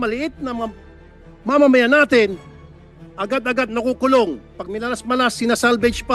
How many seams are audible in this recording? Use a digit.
0